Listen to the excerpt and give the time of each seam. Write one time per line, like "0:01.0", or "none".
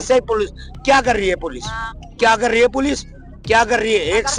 none

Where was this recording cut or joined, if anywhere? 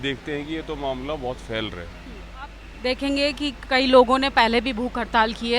0:02.6

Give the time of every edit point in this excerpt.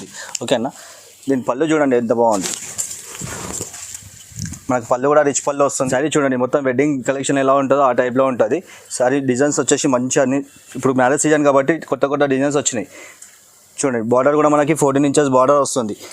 0:05.8

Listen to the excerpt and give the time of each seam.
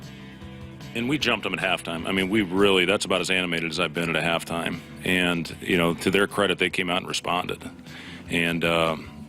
0:01.1

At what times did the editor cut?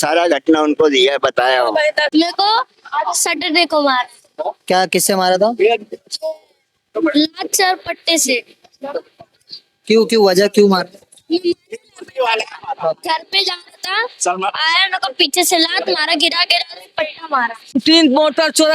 0:02.1
0:17.7

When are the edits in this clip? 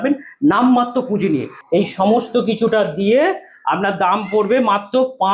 0:01.5

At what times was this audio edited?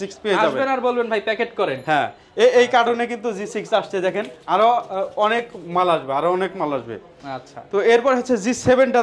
none

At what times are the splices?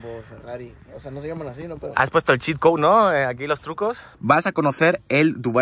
0:04.2

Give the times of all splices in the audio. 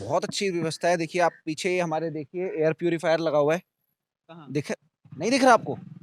none

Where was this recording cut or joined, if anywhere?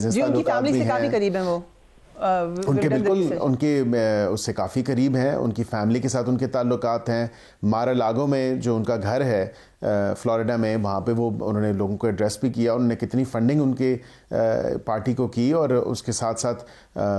none

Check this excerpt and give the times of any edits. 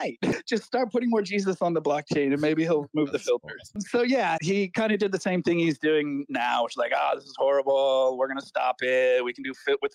0:04.4

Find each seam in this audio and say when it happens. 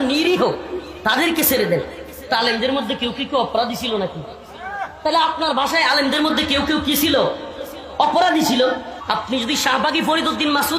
0:08.9

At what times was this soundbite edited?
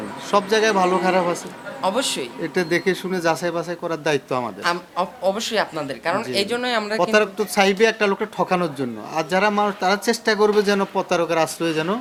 none

